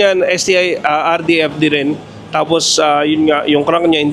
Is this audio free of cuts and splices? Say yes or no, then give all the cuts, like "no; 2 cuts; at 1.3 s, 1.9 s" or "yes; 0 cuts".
yes; 0 cuts